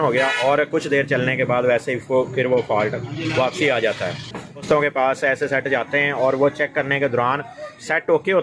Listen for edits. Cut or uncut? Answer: cut